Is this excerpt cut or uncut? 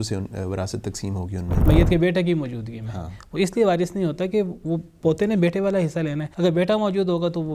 cut